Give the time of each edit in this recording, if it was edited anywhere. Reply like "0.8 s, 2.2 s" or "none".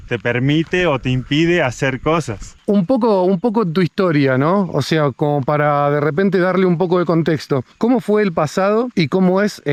none